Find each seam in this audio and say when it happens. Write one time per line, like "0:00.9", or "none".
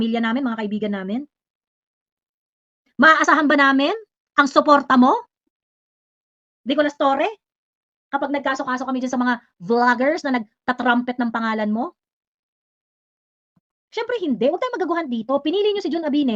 none